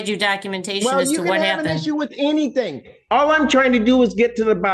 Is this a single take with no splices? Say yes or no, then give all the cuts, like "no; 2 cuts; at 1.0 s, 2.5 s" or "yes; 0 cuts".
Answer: yes; 0 cuts